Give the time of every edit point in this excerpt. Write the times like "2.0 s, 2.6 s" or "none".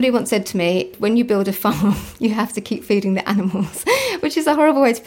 0.9 s